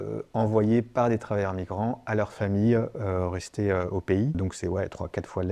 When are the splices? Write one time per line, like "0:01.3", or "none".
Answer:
0:04.4